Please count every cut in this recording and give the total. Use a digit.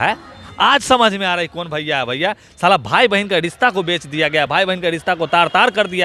0